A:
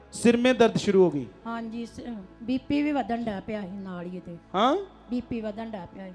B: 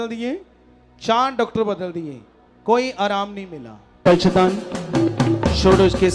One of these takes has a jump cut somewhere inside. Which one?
B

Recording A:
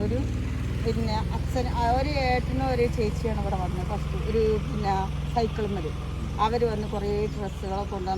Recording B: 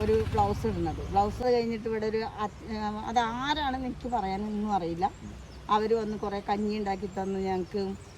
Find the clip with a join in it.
B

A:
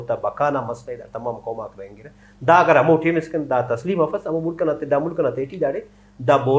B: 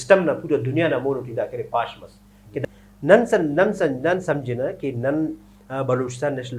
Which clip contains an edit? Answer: B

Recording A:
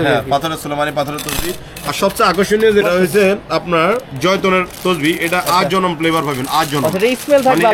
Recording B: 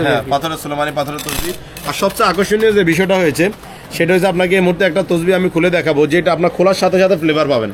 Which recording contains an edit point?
A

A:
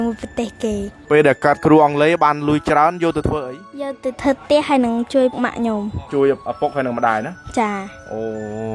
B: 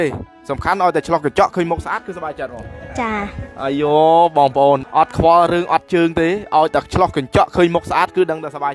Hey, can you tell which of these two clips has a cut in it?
B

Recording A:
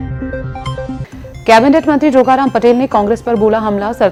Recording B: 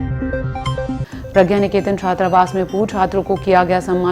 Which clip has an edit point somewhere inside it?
B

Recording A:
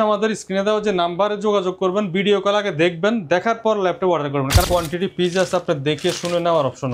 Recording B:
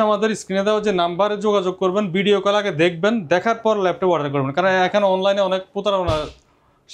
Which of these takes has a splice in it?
A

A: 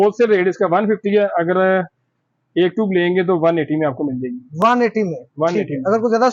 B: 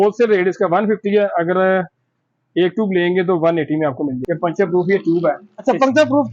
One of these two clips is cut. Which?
B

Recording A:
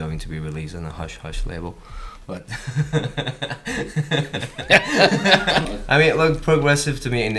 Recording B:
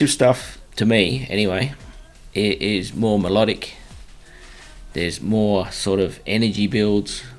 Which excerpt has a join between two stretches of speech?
A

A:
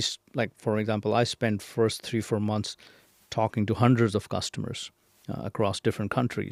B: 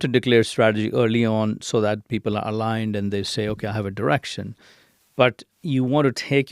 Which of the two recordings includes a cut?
B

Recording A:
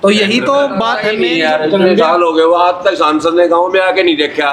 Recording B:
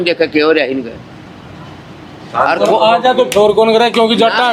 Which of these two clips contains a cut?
A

